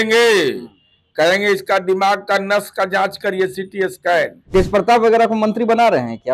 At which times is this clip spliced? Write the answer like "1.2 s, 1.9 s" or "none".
4.4 s

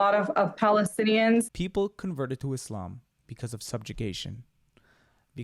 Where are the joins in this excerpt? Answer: 1.6 s

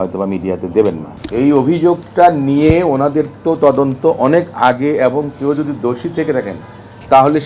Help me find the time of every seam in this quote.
1.1 s

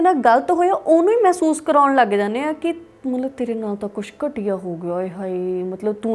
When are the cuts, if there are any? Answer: none

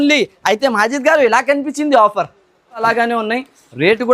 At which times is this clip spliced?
2.8 s

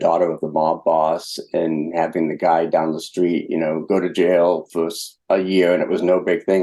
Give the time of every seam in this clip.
none

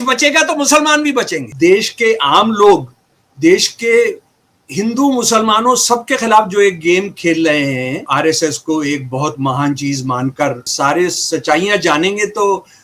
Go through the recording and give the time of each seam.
1.5 s, 8.0 s, 10.7 s

